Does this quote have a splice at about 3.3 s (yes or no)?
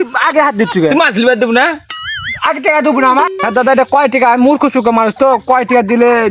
yes